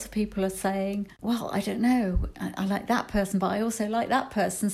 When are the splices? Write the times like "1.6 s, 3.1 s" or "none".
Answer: 1.1 s